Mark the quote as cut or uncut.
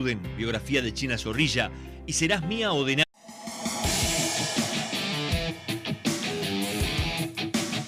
uncut